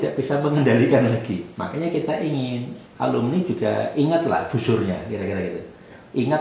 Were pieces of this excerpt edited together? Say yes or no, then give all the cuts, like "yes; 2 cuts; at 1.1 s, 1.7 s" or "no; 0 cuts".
yes; 1 cut; at 1.5 s